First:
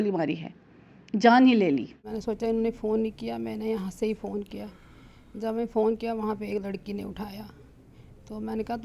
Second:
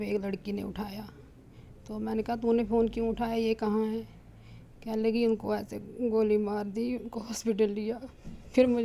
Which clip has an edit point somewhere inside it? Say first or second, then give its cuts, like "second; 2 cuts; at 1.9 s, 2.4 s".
first; 1 cut; at 2.0 s